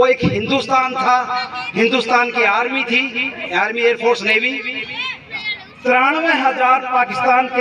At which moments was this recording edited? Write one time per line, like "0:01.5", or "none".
0:05.3